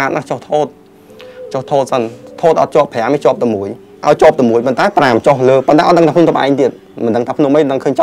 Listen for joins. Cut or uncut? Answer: cut